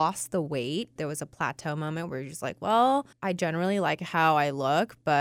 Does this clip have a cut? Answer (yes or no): yes